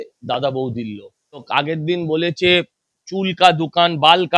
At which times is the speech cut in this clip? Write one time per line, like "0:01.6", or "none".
0:01.5